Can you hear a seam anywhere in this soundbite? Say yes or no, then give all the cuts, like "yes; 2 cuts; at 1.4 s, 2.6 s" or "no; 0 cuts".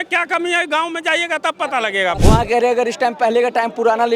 yes; 1 cut; at 2.2 s